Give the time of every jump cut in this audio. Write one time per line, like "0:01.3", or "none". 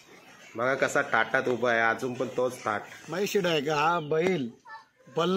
0:03.0